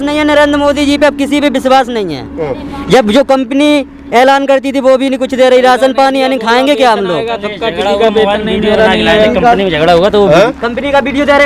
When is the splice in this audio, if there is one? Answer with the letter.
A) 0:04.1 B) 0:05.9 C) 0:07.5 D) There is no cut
D